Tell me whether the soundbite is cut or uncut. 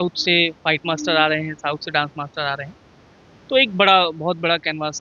uncut